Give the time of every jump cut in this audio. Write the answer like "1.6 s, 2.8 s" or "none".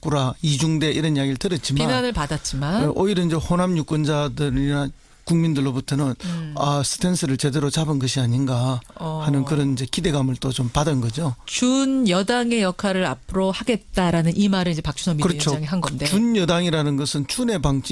4.8 s